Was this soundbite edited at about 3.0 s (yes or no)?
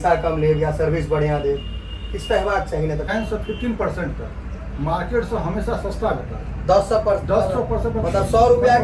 yes